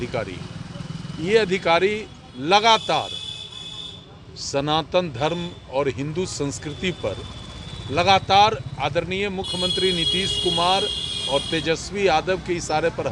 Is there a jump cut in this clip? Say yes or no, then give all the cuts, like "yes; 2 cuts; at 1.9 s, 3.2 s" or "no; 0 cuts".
no; 0 cuts